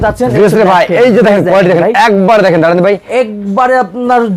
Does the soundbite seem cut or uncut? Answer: uncut